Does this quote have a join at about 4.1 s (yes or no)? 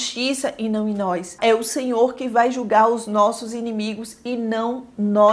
no